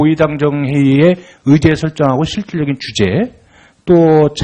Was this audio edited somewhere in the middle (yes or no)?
yes